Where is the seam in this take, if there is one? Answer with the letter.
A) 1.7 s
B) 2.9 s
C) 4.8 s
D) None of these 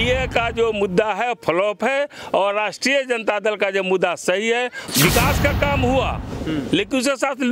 C